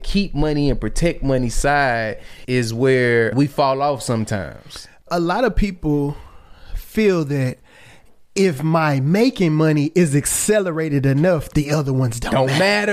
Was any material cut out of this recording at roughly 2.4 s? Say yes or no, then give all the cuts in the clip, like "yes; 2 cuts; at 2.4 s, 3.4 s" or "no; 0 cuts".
yes; 3 cuts; at 2.4 s, 3.3 s, 5.0 s